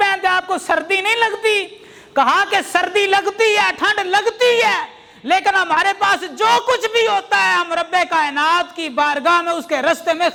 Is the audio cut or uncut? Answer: uncut